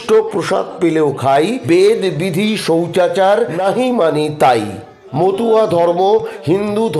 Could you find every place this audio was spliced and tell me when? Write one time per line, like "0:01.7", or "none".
0:01.6
0:03.6
0:05.0